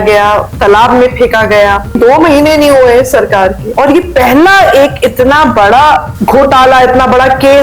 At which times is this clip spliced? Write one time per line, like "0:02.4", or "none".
0:02.0
0:03.6
0:06.1